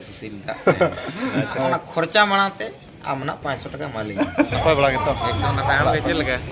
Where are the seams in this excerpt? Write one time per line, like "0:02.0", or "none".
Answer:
0:01.5
0:04.5